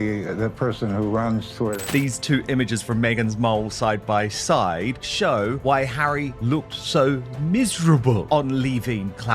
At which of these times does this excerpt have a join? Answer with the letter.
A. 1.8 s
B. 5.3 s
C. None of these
A